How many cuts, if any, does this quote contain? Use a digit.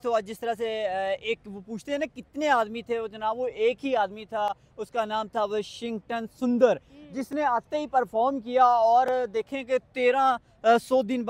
0